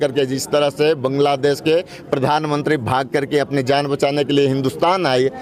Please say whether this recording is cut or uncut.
uncut